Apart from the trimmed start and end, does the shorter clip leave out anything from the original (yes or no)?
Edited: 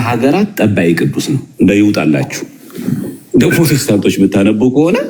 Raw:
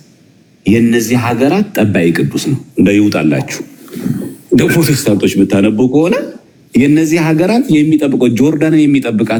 no